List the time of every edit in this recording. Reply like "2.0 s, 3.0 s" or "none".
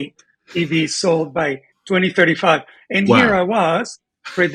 none